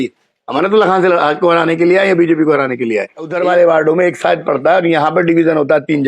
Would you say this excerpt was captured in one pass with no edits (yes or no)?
no